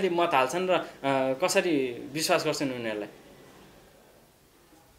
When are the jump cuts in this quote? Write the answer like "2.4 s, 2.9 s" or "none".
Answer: none